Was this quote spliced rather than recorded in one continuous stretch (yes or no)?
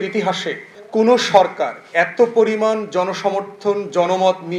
no